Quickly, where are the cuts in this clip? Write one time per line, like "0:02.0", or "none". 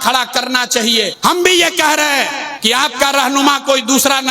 0:01.1
0:02.5